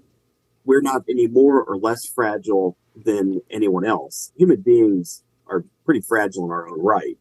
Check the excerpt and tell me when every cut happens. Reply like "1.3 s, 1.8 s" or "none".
4.3 s, 5.4 s

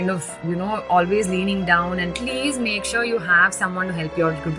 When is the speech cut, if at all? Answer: 2.2 s

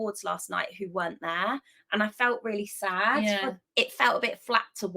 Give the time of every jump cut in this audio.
3.6 s

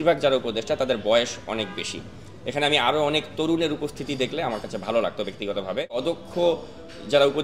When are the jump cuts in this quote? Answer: 6.0 s

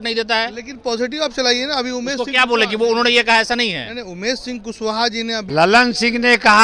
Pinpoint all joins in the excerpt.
5.5 s

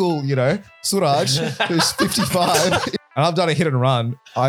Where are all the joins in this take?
2.9 s

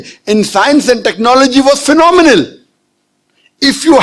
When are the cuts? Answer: none

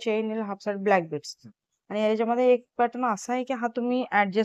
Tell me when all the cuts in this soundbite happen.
none

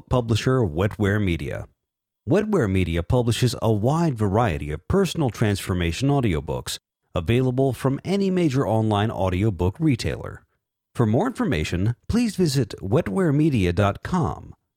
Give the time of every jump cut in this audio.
none

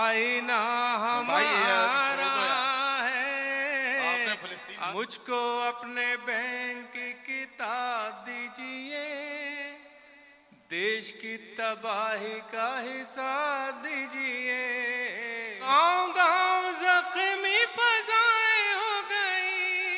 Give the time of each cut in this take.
4.9 s, 15.7 s

